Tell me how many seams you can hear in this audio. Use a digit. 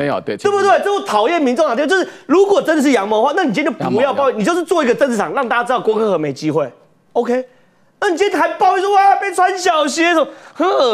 0